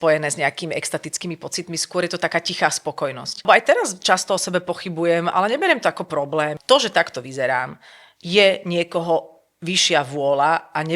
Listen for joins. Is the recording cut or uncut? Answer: cut